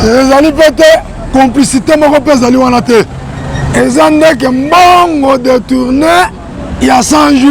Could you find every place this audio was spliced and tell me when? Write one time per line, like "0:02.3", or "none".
none